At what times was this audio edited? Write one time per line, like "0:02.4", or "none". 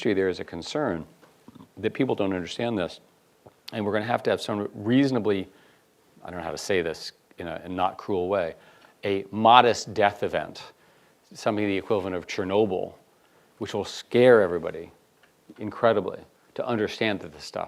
0:03.2